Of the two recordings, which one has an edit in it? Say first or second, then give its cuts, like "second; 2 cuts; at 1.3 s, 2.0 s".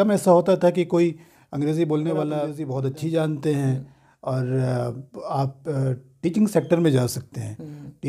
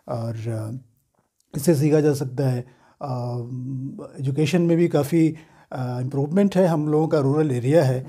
first; 1 cut; at 2.6 s